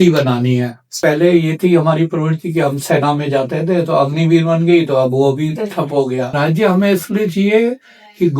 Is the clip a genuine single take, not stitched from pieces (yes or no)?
no